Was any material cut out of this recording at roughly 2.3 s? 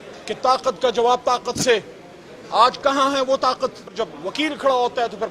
no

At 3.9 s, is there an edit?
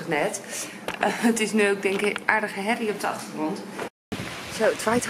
yes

